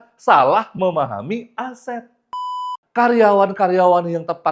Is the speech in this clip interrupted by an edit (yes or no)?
yes